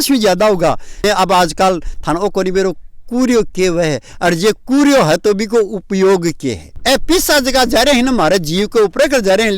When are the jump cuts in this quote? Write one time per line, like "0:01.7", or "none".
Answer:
0:01.0
0:06.6